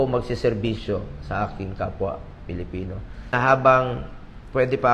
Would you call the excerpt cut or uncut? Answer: cut